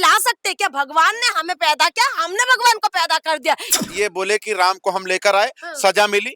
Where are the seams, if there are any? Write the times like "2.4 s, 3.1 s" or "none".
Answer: 3.7 s